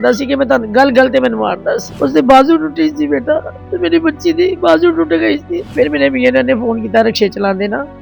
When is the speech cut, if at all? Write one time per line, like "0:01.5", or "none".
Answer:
0:01.9
0:05.6